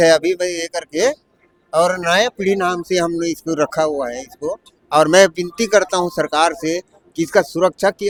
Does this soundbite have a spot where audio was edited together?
no; 0 cuts

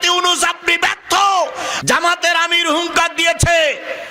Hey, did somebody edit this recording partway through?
yes; 1 cut; at 1.7 s

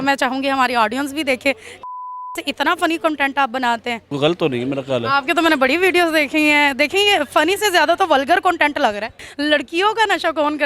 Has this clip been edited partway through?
yes; 2 cuts; at 4.1 s, 9.2 s

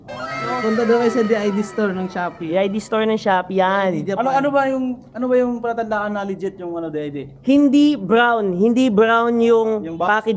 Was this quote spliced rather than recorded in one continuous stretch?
no; 0 cuts

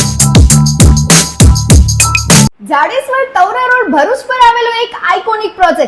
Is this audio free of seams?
no; 1 cut; at 2.6 s

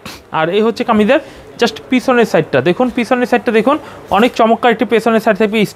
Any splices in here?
no; 0 cuts

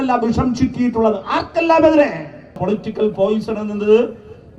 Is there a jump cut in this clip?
yes; 1 cut; at 2.6 s

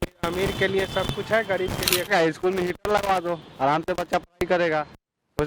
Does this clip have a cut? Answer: yes; 1 cut; at 2.1 s

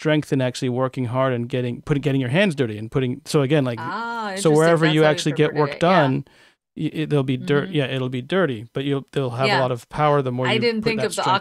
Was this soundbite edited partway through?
no; 0 cuts

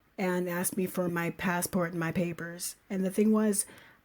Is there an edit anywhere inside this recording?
yes; 1 cut; at 1.1 s

